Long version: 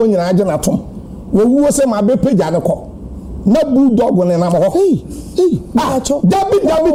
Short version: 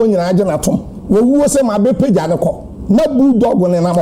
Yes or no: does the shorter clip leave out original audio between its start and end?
yes